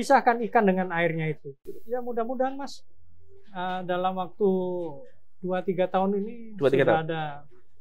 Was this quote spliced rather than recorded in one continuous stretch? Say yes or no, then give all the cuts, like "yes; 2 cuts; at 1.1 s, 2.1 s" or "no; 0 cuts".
yes; 1 cut; at 1.7 s